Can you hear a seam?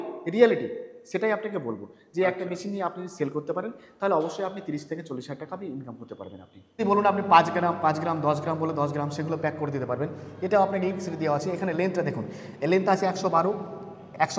yes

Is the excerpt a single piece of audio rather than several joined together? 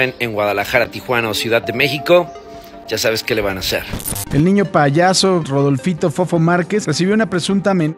no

